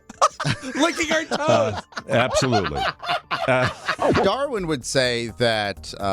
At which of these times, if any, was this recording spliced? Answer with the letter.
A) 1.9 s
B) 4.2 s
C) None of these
B